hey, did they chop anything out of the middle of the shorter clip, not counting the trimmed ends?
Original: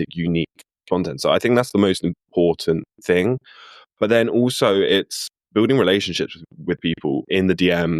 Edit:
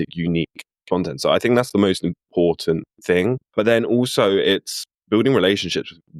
yes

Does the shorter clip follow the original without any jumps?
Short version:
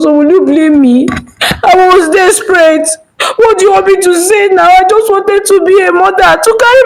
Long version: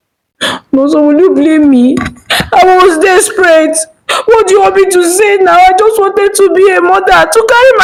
yes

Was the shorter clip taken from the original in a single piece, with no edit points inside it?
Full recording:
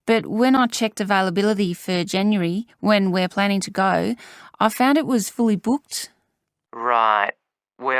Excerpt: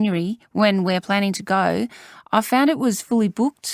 yes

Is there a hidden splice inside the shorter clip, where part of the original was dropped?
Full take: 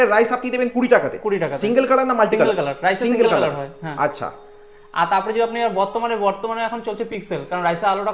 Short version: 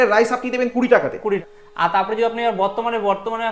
yes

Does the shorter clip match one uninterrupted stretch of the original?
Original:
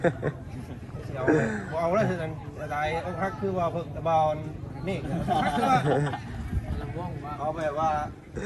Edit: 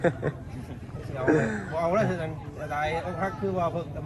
yes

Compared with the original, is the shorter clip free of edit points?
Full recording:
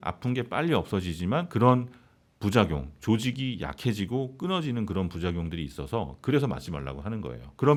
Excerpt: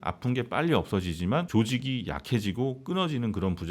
no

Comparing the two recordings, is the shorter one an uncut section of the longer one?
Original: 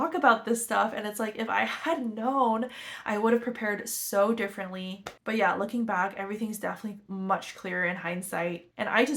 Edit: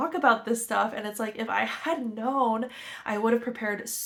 yes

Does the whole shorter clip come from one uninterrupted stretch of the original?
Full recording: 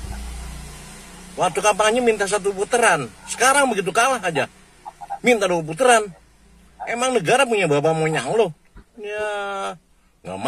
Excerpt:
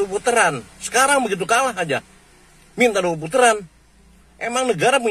yes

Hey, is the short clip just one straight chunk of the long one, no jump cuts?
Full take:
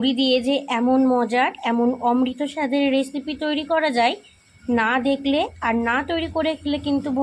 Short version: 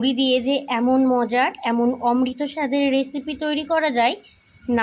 yes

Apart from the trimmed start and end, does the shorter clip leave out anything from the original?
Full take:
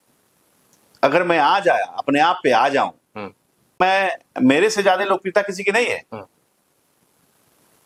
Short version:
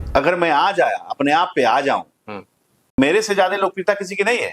yes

